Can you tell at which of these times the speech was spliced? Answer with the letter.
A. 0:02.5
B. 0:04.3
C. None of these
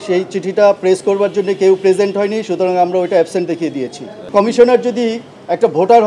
B